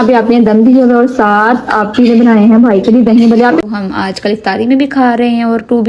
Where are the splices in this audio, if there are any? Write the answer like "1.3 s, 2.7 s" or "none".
3.6 s